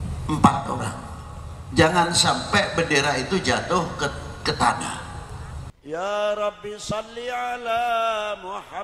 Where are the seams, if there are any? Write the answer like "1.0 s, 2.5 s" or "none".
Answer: 5.8 s